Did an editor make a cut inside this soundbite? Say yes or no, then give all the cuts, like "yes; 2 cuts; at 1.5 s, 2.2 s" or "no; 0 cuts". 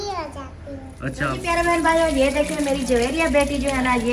yes; 1 cut; at 1.3 s